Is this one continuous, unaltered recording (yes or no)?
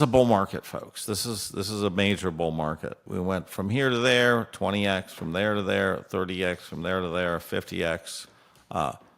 no